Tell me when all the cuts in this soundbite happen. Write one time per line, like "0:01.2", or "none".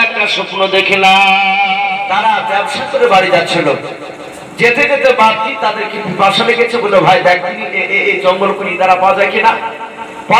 0:01.8

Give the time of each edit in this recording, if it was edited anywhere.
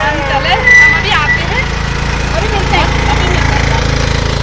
none

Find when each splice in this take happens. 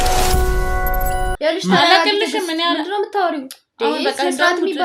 0:01.3

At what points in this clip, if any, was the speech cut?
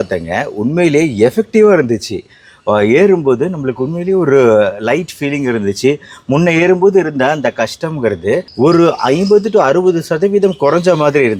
none

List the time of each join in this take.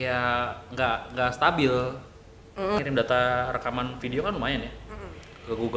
0:02.8

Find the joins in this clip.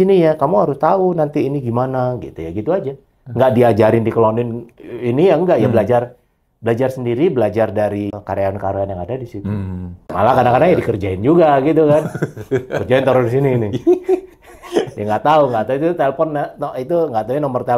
0:08.1
0:10.1

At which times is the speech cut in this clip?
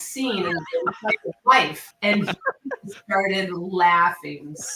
none

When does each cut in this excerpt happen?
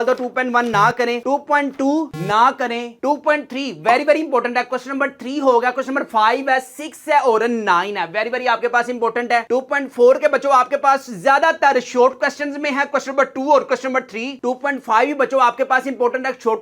none

